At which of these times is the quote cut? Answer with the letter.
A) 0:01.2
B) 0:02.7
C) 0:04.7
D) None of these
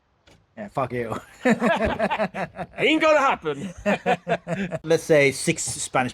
C